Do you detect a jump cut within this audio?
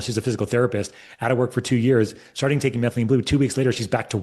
no; 0 cuts

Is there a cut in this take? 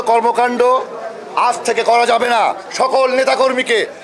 yes; 1 cut; at 2.6 s

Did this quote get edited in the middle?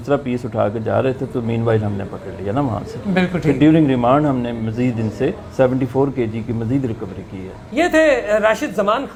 no; 0 cuts

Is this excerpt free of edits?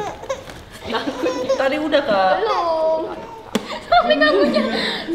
no; 1 cut; at 3.7 s

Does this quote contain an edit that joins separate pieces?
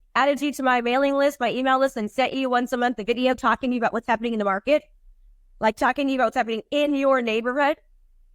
no; 0 cuts

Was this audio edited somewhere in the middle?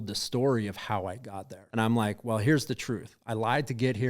yes; 1 cut; at 1.6 s

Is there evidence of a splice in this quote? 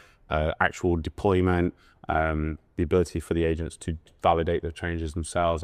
no; 0 cuts

